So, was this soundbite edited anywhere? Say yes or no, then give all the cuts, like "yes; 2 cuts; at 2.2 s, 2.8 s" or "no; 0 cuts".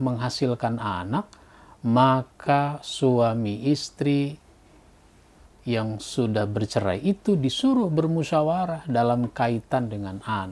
no; 0 cuts